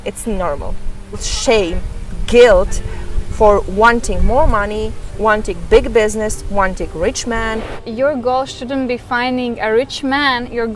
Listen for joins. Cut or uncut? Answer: cut